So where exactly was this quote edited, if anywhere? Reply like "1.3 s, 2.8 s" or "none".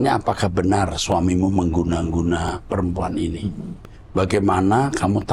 none